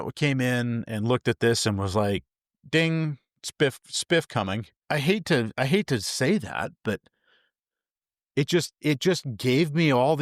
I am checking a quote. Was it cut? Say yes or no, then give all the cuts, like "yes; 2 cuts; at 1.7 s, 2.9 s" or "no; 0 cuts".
yes; 1 cut; at 4.7 s